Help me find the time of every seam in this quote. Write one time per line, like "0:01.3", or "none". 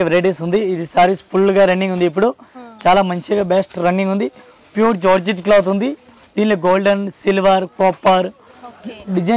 none